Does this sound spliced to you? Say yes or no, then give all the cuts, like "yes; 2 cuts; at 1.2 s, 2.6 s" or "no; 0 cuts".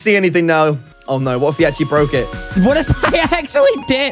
yes; 2 cuts; at 0.9 s, 2.5 s